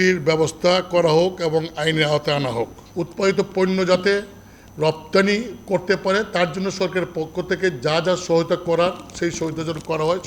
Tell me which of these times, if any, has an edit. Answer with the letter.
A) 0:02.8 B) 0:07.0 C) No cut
A